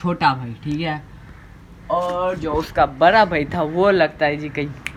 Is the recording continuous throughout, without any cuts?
yes; 0 cuts

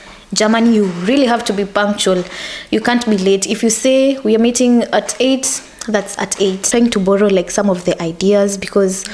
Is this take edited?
yes; 1 cut; at 6.7 s

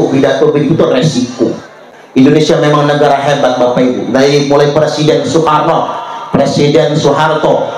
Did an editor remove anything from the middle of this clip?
yes; 1 cut; at 1.8 s

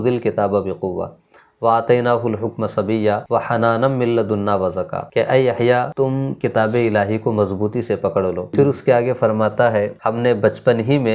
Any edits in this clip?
yes; 5 cuts; at 3.2 s, 5.0 s, 5.9 s, 8.5 s, 9.9 s

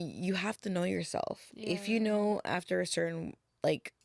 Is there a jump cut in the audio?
no; 0 cuts

